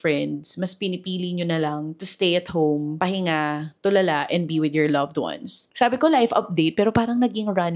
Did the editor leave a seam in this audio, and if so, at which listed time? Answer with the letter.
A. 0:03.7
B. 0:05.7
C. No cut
B